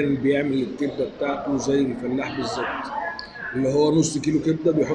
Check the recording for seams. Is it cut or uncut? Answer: uncut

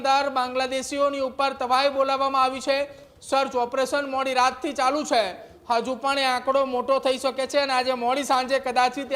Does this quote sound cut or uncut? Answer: uncut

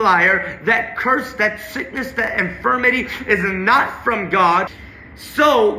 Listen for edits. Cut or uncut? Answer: cut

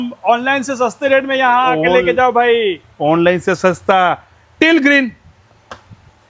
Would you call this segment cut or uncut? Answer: uncut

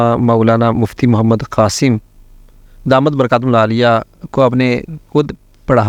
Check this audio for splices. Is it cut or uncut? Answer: uncut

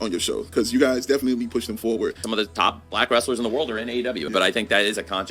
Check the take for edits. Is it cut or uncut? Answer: cut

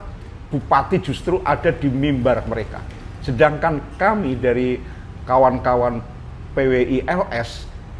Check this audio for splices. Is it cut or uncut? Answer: uncut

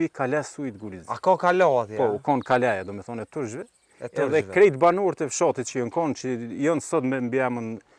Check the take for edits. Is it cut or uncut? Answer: uncut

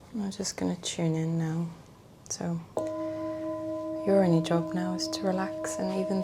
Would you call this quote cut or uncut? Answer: uncut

